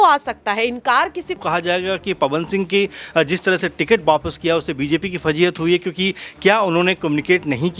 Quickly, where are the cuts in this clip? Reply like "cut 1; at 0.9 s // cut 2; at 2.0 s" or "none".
cut 1; at 1.4 s